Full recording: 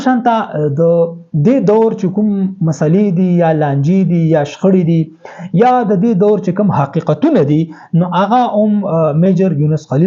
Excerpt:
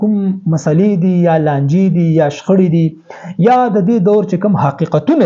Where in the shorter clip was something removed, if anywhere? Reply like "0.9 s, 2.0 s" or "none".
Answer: none